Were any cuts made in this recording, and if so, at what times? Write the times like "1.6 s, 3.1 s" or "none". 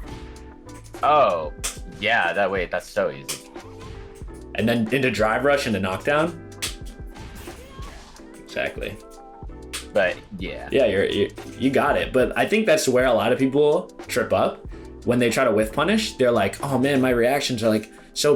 none